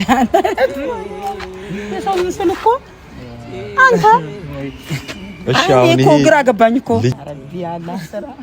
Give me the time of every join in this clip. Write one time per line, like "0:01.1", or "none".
0:07.2